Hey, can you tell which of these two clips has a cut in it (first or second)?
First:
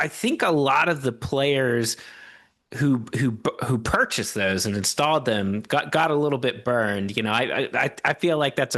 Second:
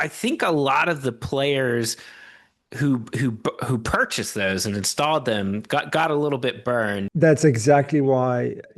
second